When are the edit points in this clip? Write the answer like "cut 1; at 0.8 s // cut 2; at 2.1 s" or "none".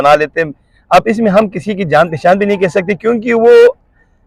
none